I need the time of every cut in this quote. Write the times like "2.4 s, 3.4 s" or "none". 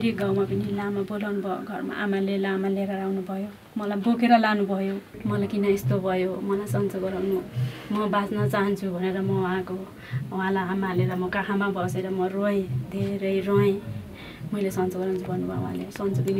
5.1 s